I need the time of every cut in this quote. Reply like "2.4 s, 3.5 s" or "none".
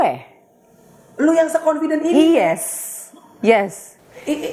none